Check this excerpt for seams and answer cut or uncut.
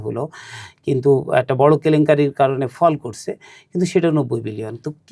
uncut